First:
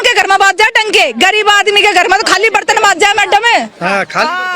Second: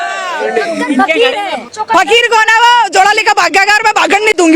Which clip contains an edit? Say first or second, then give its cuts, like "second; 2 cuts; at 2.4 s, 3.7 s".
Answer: second; 1 cut; at 1.7 s